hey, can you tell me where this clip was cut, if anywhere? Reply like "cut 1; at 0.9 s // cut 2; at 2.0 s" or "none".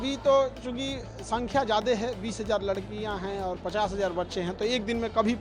none